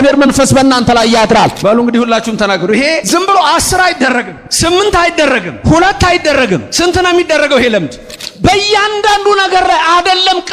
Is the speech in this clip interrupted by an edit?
yes; 6 cuts; at 1.6 s, 3.0 s, 4.4 s, 5.5 s, 6.7 s, 8.2 s

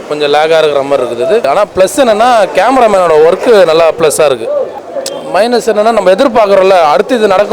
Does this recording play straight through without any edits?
no; 2 cuts; at 1.5 s, 4.8 s

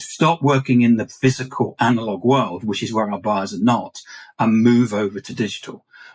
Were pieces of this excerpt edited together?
yes; 2 cuts; at 1.0 s, 5.2 s

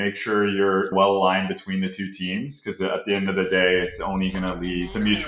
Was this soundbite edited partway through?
no; 0 cuts

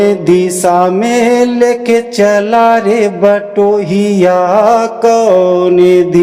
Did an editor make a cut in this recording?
no; 0 cuts

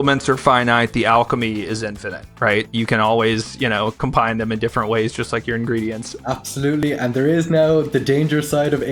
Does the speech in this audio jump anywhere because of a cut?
yes; 1 cut; at 6.1 s

